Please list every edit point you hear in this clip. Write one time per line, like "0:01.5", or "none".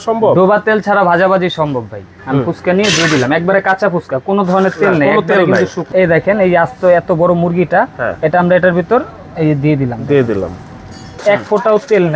0:02.1
0:05.8
0:11.2

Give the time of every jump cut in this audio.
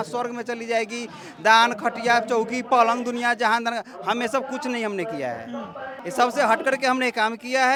none

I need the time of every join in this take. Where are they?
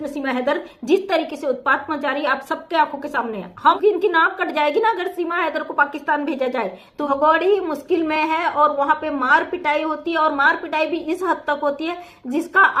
0:03.8
0:06.9

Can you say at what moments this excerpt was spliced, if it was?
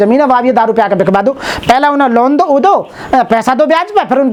none

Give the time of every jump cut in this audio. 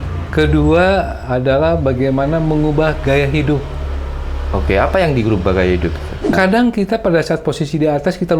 0:06.3

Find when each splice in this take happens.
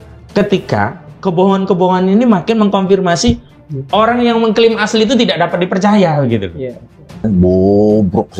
0:07.2

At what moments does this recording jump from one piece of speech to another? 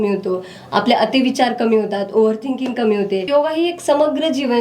0:03.3

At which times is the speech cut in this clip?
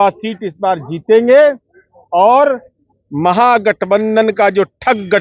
none

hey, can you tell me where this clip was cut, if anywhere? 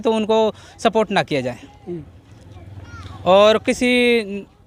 none

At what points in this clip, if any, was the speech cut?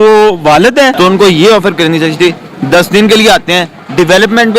0:01.0

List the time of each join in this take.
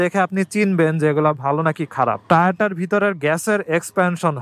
0:02.2

